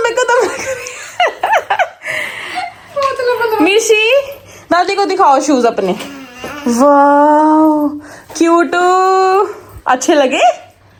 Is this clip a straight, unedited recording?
yes; 0 cuts

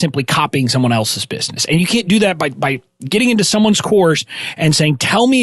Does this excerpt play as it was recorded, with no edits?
yes; 0 cuts

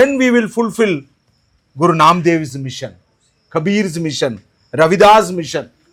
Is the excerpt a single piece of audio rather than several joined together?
yes; 0 cuts

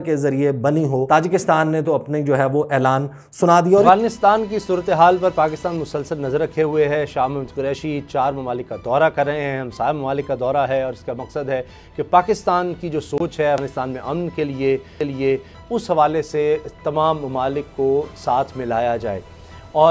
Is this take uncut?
yes; 0 cuts

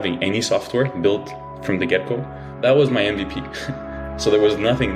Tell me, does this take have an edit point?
yes; 1 cut; at 2.4 s

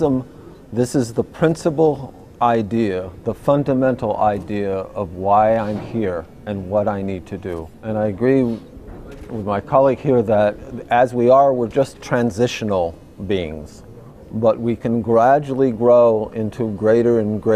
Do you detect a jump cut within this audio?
yes; 1 cut; at 2.2 s

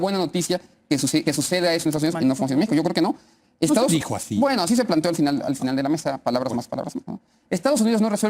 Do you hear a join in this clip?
no; 0 cuts

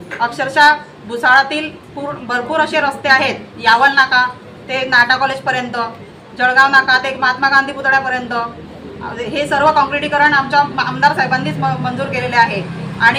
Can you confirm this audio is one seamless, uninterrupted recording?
yes; 0 cuts

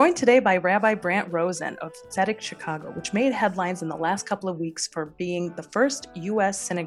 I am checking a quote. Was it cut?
no; 0 cuts

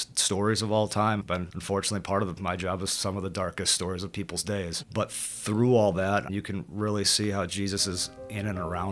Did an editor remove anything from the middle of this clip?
yes; 1 cut; at 1.2 s

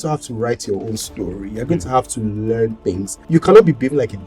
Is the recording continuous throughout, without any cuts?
no; 1 cut; at 3.1 s

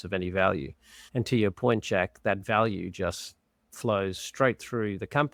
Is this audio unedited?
yes; 0 cuts

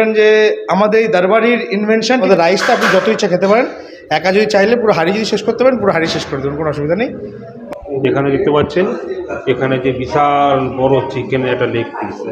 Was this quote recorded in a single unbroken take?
no; 2 cuts; at 2.2 s, 7.5 s

